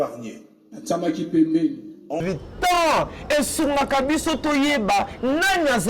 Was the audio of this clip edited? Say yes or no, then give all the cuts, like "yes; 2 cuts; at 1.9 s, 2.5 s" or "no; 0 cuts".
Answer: yes; 1 cut; at 2.2 s